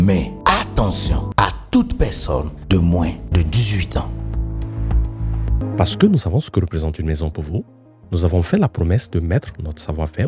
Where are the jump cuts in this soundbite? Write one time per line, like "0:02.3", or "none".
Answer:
0:01.2

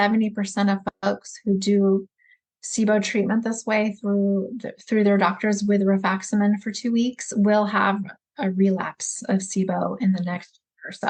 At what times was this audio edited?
none

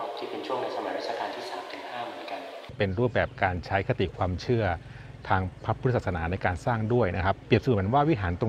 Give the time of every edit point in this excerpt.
0:02.7

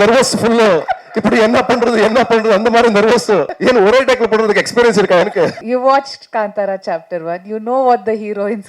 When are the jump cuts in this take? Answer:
0:03.5
0:05.6

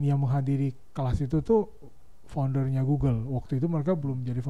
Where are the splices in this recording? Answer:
none

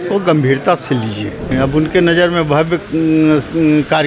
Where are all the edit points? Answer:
0:01.5

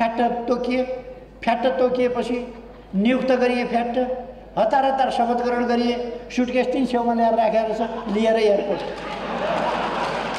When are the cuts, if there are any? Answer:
none

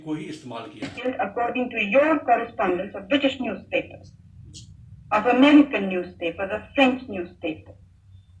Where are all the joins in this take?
0:00.9

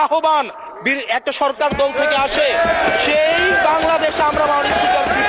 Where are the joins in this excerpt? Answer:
none

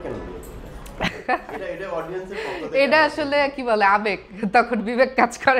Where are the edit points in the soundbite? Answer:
none

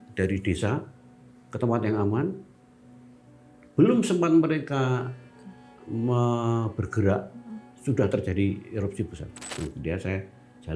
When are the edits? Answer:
0:09.5

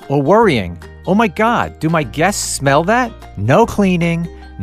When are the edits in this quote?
0:03.3

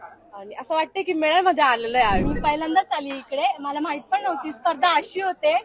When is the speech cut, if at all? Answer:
0:02.3

